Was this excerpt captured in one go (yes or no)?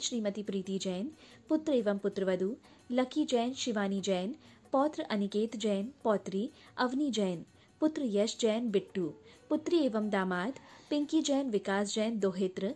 yes